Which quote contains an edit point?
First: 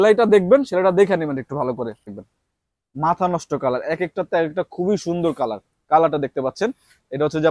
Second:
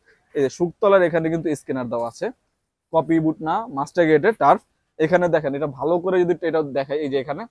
first; 1 cut; at 2.0 s

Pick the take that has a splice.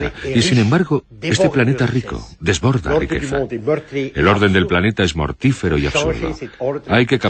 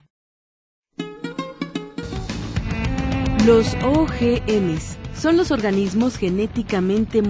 first; 1 cut; at 1.5 s

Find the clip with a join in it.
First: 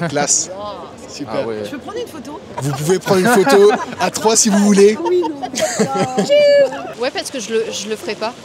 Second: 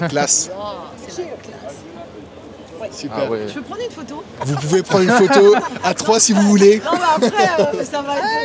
first; 3 cuts; at 1.1 s, 5.0 s, 6.9 s

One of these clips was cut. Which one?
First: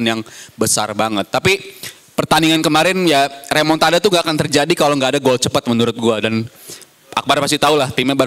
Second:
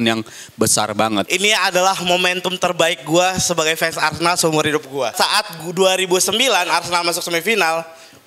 second; 2 cuts; at 1.3 s, 5.1 s

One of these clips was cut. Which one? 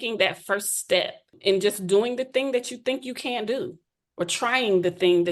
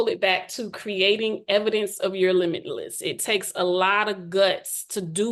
first; 1 cut; at 1.3 s

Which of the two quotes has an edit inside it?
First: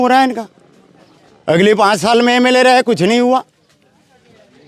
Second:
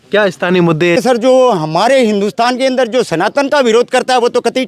second; 1 cut; at 0.9 s

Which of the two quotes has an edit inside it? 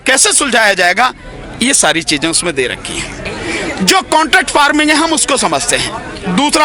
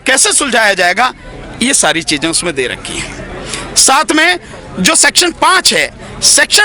first; 1 cut; at 3.3 s

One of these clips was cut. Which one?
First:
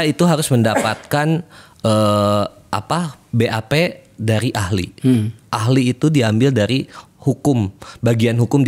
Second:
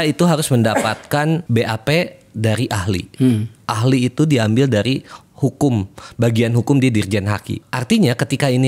second; 2 cuts; at 1.4 s, 7.5 s

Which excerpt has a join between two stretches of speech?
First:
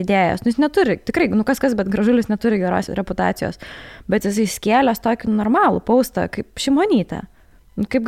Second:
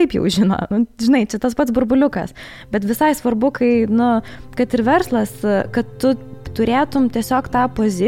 first; 1 cut; at 2.9 s

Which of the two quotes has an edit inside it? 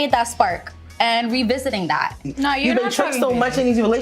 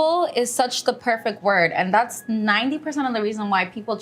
first; 1 cut; at 2.3 s

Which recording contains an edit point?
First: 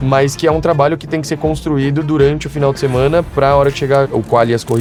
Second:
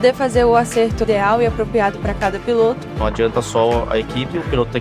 second; 2 cuts; at 1.0 s, 2.9 s

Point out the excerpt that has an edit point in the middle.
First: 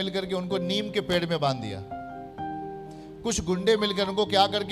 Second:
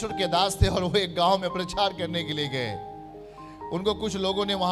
first; 2 cuts; at 1.9 s, 3.2 s

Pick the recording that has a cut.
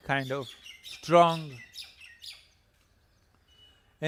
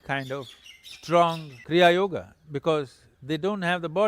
second; 1 cut; at 1.5 s

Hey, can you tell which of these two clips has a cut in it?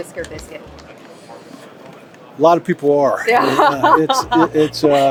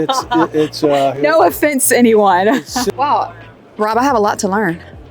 second; 1 cut; at 2.9 s

